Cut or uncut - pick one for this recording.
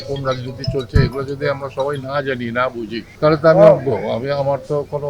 cut